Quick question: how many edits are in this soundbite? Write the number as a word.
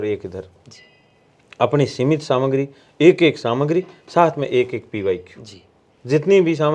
zero